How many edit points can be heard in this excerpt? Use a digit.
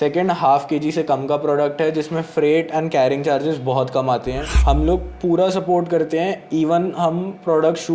1